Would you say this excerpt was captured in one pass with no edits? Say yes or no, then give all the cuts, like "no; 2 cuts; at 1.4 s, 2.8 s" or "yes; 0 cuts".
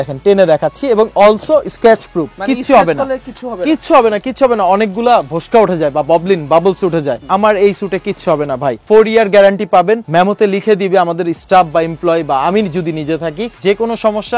yes; 0 cuts